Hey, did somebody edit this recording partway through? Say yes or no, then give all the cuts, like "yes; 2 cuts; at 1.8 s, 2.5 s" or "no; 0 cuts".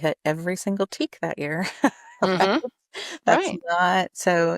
no; 0 cuts